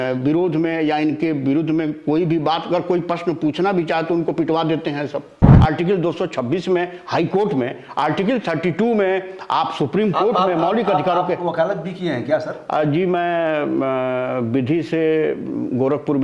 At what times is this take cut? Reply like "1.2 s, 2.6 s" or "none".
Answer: 5.5 s